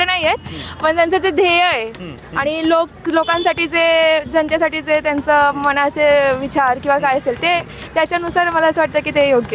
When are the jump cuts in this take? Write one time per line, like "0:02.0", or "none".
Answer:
none